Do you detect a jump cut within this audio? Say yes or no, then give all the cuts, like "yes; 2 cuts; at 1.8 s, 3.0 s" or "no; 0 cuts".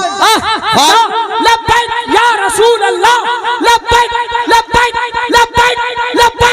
yes; 1 cut; at 0.9 s